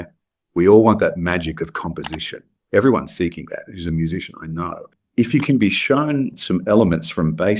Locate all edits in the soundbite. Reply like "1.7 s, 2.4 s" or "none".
5.0 s